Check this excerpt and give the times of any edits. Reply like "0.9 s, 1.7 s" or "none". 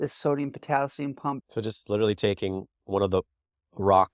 1.4 s